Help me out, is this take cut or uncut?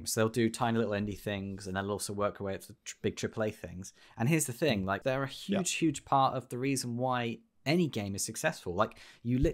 cut